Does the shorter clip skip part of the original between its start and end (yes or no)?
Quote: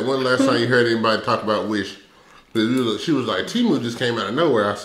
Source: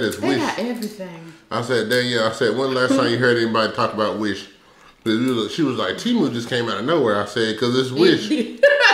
no